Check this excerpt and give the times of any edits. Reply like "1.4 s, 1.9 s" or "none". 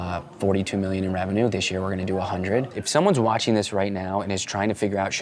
2.8 s